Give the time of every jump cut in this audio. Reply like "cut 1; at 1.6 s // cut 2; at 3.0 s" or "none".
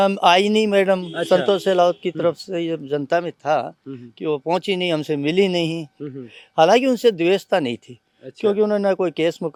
none